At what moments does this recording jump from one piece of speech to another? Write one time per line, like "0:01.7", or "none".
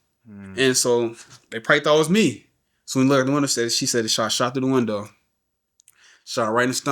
none